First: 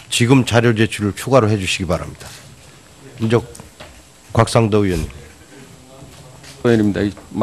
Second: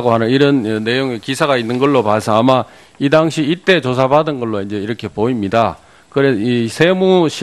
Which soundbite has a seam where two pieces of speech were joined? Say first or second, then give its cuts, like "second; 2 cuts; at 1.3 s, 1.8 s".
second; 1 cut; at 3.6 s